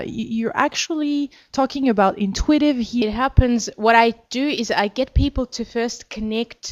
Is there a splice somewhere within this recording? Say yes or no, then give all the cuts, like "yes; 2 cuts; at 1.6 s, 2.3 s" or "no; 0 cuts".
no; 0 cuts